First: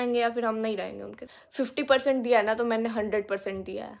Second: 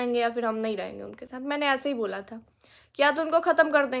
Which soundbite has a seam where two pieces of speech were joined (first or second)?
first